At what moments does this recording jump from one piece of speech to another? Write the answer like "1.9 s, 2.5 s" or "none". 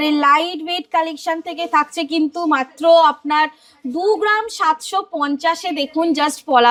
none